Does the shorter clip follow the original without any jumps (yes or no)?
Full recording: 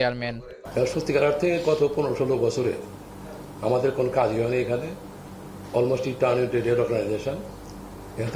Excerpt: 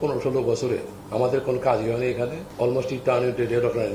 no